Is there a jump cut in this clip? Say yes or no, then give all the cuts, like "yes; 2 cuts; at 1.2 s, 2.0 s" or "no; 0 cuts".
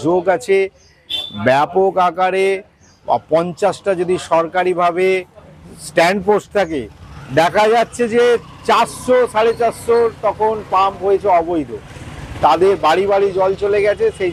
no; 0 cuts